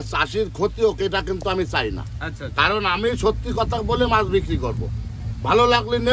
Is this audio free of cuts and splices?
yes; 0 cuts

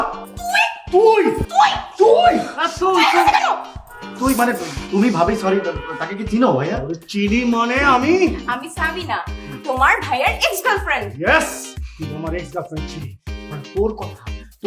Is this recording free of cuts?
no; 1 cut; at 1.4 s

